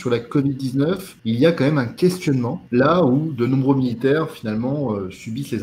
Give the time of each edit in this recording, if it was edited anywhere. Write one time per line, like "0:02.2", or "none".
0:01.1
0:02.6